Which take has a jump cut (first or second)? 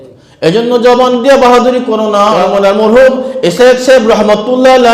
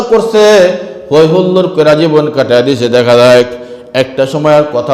first